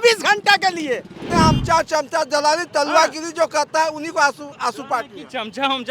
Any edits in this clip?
yes; 1 cut; at 1.2 s

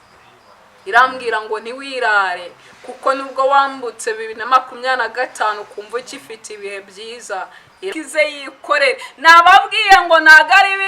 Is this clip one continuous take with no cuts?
no; 1 cut; at 7.9 s

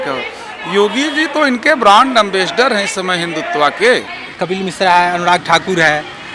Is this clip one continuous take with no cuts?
no; 1 cut; at 4.2 s

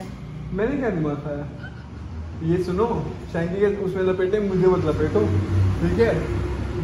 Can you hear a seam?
no; 0 cuts

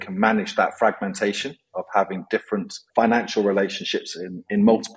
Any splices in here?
no; 0 cuts

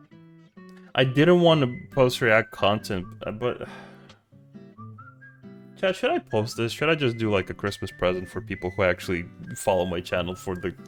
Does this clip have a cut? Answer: no; 0 cuts

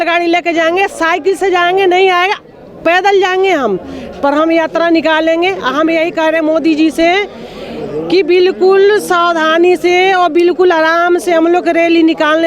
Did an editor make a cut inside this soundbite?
no; 0 cuts

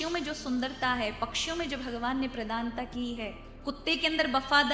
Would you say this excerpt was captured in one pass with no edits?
no; 1 cut; at 3.5 s

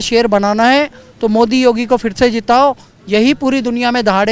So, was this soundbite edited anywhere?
no; 0 cuts

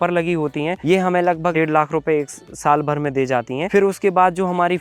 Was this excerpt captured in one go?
no; 3 cuts; at 0.8 s, 1.5 s, 3.7 s

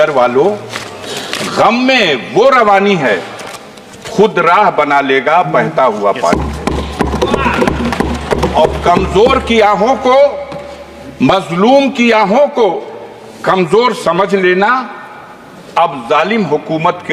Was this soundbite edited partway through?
no; 0 cuts

